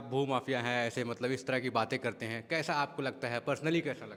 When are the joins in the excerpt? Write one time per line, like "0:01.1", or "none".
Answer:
none